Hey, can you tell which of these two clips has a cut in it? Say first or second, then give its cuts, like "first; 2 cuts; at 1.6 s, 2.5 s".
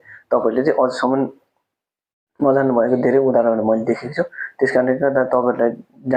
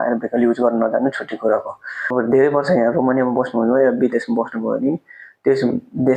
second; 1 cut; at 2.1 s